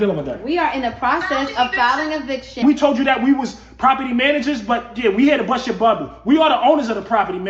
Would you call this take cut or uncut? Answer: cut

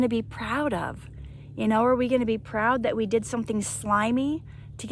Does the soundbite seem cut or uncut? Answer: uncut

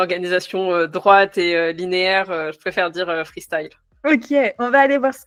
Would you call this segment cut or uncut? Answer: uncut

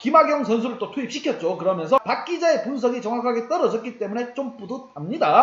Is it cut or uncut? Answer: cut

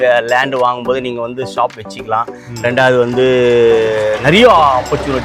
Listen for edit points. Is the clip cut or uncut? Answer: uncut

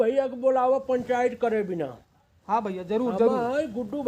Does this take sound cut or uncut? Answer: uncut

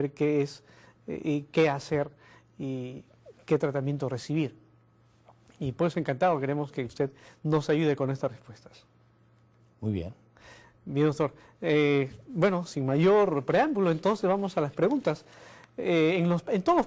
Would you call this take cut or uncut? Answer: cut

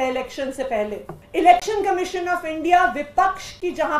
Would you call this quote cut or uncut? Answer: cut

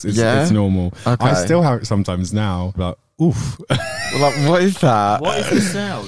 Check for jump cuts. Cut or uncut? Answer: cut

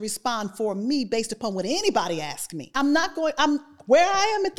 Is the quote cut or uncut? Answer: cut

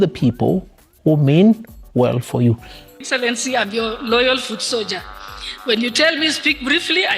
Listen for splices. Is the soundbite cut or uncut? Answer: cut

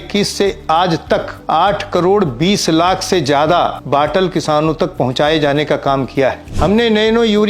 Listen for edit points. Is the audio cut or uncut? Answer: cut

